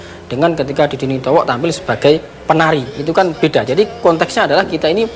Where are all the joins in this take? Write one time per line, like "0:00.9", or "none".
0:02.6

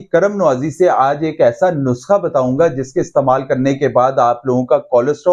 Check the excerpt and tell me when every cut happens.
none

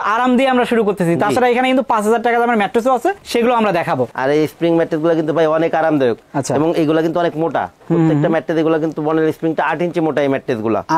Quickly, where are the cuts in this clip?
0:04.1

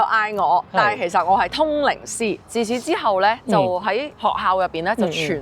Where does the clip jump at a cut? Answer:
0:02.4
0:03.8

